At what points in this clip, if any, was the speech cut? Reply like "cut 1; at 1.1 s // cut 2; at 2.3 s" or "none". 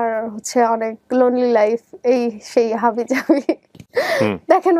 none